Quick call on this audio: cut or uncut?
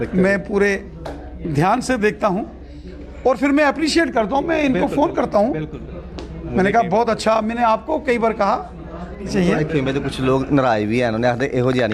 cut